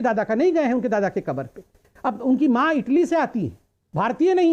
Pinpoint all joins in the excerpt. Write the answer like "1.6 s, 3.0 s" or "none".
none